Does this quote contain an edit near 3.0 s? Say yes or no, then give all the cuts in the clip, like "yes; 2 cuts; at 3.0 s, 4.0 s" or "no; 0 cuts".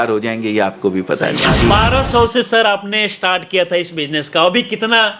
no; 1 cut; at 1.6 s